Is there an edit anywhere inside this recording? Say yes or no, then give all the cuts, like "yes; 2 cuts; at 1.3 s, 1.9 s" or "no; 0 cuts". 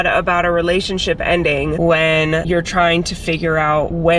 no; 0 cuts